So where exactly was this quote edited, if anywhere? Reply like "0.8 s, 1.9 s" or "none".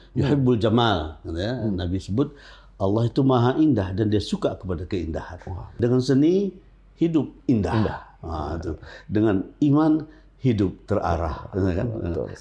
5.8 s